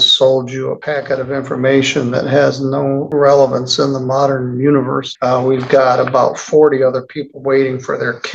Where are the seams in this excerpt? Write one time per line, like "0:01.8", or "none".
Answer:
0:00.8
0:03.1
0:05.1